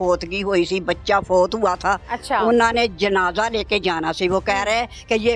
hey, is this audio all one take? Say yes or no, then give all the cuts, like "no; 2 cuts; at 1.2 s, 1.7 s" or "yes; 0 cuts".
no; 1 cut; at 2.1 s